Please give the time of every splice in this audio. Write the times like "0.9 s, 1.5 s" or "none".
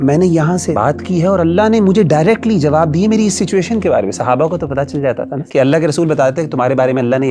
0.7 s, 5.4 s